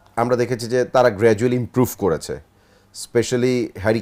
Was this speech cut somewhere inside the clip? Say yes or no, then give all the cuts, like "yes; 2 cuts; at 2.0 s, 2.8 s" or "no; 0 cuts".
no; 0 cuts